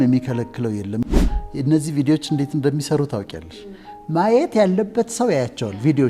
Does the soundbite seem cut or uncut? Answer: cut